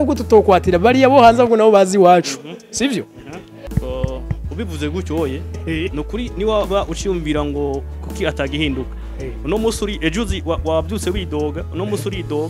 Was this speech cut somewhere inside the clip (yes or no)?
yes